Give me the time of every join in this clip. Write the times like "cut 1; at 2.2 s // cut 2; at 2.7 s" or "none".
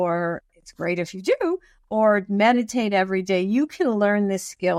none